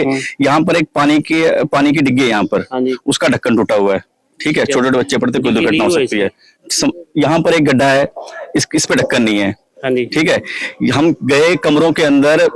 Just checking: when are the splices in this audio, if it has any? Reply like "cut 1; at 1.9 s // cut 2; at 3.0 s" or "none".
none